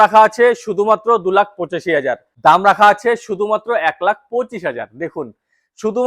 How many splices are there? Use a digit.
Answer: 1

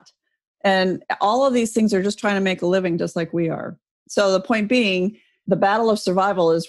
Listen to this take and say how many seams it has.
1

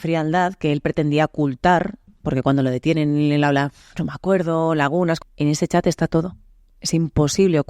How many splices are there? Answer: 1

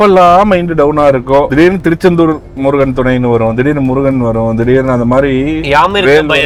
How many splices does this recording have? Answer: 0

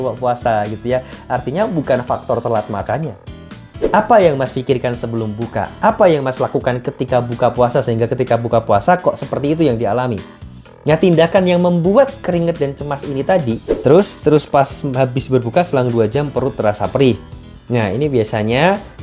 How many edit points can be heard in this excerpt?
2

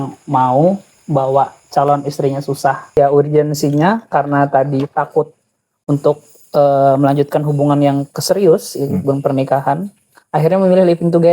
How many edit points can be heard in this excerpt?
1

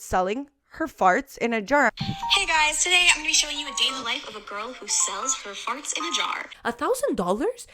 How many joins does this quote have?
2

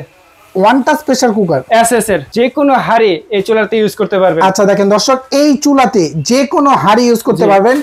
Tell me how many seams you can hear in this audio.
1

